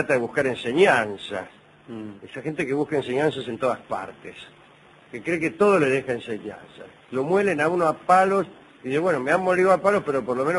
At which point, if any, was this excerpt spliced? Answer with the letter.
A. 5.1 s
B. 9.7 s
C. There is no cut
A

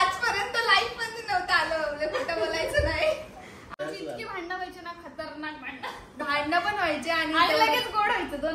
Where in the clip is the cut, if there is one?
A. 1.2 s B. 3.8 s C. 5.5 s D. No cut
B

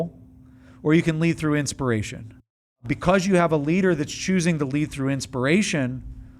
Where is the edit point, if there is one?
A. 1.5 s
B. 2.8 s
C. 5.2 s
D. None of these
B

